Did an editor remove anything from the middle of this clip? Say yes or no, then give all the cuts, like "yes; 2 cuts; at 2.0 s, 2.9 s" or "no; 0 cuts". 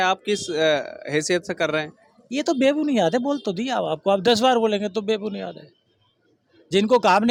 no; 0 cuts